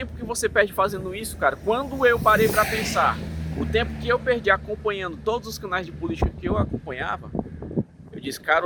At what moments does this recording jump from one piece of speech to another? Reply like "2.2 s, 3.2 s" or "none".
none